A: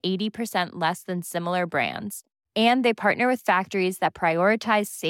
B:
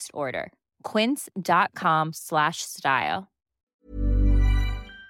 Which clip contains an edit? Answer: B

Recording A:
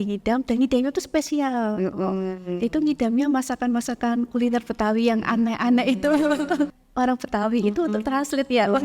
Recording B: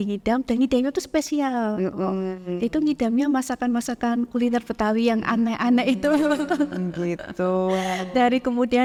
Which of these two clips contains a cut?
A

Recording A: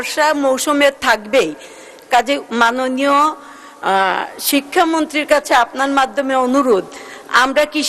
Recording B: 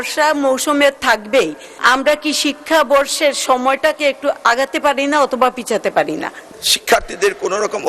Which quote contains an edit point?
B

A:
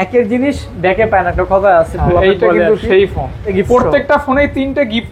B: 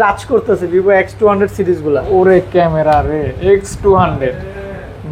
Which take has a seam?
A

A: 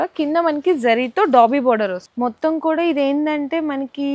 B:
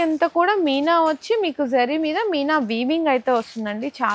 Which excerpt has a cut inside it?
A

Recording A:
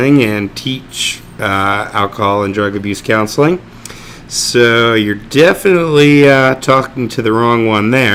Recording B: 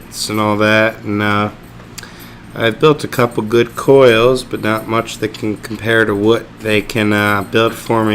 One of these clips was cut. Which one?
B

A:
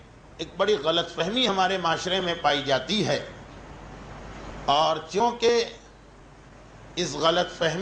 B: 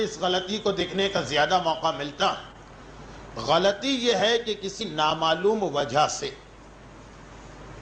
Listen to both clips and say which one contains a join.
B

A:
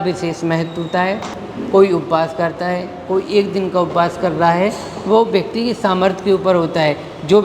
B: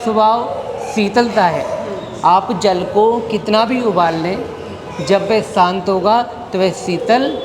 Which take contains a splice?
A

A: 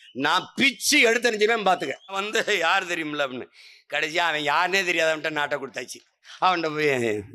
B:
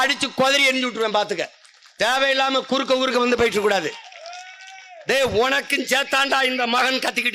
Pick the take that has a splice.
A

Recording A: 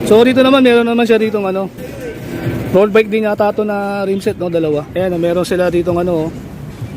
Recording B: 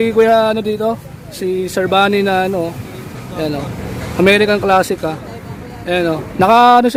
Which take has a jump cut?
A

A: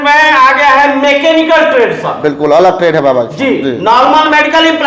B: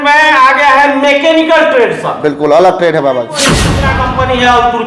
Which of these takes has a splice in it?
B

